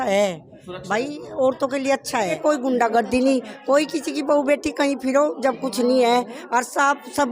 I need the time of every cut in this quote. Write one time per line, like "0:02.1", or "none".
0:02.4